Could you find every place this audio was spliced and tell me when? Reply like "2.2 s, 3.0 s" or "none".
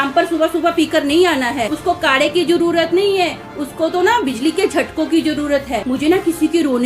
1.7 s, 5.8 s